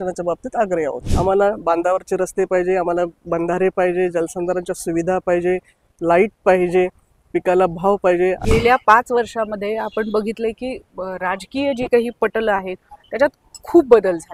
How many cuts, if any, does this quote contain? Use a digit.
2